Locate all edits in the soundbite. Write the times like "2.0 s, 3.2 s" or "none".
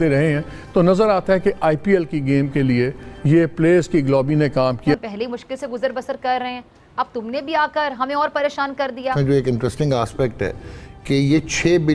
4.9 s, 9.1 s